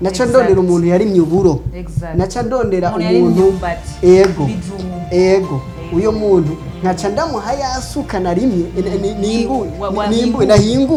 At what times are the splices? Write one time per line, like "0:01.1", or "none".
none